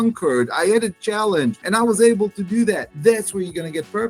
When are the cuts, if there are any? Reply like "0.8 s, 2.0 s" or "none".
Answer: 1.6 s, 2.9 s